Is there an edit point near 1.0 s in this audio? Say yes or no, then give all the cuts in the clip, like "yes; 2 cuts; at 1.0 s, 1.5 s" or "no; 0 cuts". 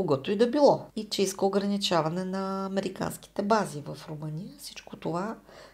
yes; 1 cut; at 1.0 s